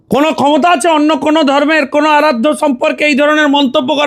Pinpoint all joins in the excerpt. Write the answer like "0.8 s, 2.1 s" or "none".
none